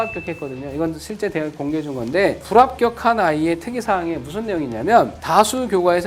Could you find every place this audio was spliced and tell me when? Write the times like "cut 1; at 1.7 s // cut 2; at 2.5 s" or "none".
none